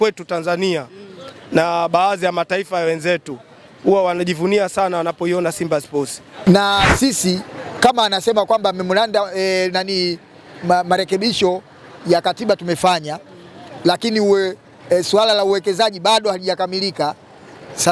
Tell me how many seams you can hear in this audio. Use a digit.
1